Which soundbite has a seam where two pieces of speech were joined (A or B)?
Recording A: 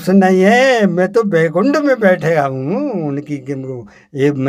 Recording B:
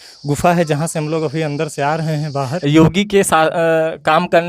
B